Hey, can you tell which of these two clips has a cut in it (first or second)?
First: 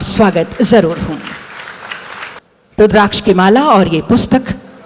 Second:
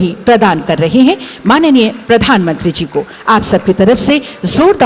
first